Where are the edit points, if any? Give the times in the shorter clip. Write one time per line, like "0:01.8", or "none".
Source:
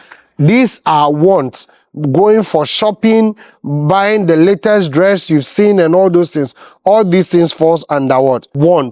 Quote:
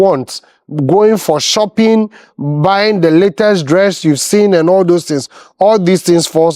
none